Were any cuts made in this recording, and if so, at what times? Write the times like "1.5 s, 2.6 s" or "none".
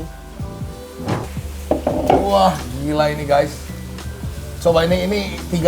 1.2 s